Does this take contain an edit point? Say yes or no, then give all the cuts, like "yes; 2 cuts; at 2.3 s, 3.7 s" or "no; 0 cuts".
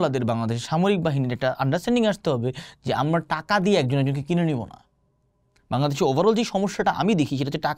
no; 0 cuts